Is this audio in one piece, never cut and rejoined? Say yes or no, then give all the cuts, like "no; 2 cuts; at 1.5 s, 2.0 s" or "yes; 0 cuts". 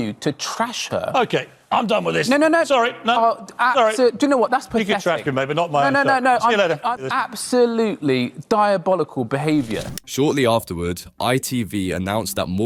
yes; 0 cuts